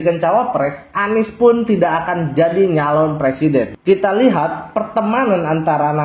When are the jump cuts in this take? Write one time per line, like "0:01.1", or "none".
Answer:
0:03.7